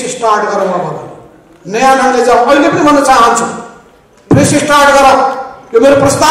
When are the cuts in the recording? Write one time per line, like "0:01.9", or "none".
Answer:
none